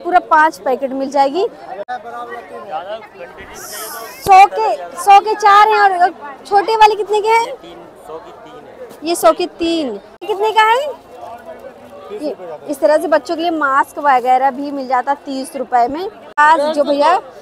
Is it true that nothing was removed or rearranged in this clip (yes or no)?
no